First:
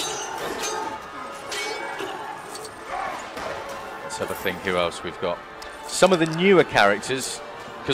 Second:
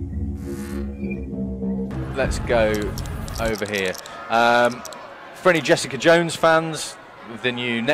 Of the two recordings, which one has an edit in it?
first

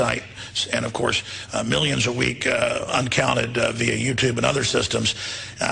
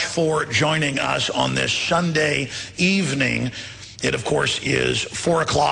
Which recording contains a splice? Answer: first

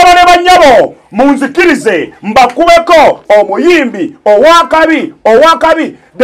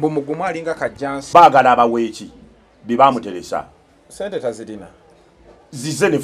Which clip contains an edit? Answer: second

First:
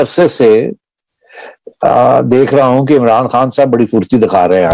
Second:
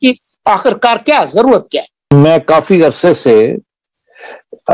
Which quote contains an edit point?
second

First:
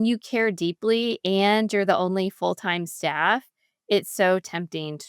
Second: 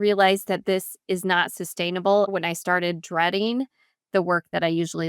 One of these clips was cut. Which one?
second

